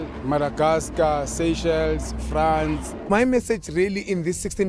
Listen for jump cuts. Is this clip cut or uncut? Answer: cut